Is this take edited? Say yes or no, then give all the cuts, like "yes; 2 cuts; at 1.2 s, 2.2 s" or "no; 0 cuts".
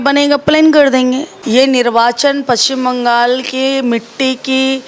yes; 1 cut; at 1.3 s